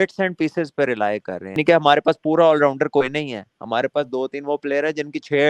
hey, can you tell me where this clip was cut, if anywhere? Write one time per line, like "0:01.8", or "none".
0:01.6